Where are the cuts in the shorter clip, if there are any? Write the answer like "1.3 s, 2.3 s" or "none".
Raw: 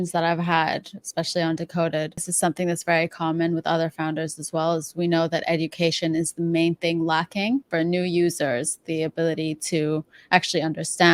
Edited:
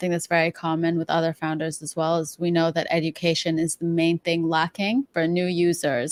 none